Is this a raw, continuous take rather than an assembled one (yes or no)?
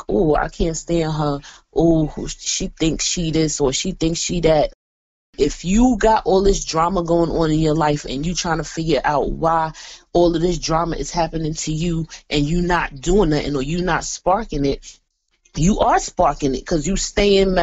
no